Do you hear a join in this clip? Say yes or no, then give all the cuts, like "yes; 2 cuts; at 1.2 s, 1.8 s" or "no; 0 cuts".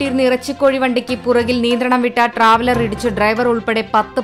no; 0 cuts